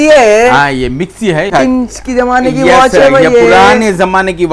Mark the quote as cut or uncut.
cut